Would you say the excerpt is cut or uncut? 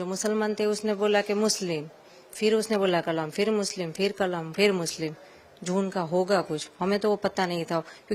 uncut